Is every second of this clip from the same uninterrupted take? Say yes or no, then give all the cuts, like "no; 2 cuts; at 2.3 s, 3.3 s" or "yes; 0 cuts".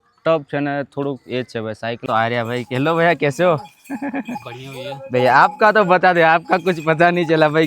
no; 1 cut; at 2.0 s